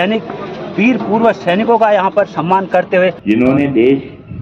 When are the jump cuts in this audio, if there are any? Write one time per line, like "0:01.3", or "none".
0:03.2